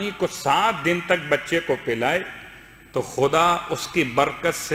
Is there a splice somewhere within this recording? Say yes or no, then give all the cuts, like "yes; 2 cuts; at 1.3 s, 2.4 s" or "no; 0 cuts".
no; 0 cuts